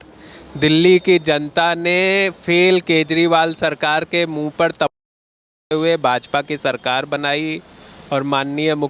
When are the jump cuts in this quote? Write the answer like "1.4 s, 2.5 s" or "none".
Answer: none